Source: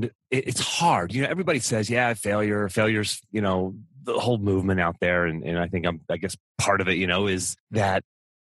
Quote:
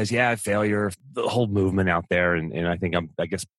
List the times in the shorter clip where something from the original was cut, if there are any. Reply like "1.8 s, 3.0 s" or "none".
0.9 s